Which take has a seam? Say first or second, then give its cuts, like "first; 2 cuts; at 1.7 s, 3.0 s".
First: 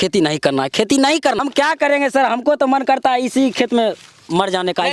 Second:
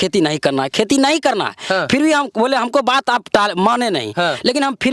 first; 1 cut; at 1.4 s